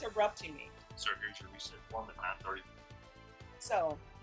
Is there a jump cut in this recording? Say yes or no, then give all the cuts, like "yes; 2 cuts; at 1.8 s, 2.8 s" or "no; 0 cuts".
no; 0 cuts